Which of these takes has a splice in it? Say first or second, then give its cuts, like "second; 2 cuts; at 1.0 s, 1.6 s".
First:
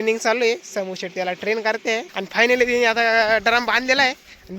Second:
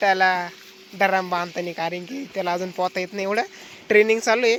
first; 1 cut; at 2.1 s